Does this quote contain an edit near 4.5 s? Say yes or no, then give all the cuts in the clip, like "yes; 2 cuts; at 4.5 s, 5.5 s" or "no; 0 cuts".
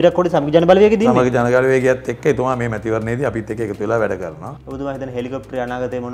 yes; 1 cut; at 4.5 s